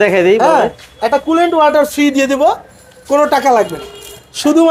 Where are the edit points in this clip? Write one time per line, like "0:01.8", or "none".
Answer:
none